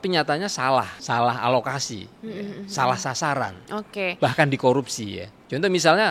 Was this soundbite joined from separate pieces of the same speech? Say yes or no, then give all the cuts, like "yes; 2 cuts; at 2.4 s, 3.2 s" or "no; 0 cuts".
yes; 1 cut; at 1.0 s